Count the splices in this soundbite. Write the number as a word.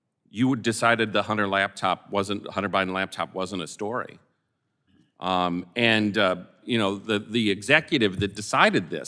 zero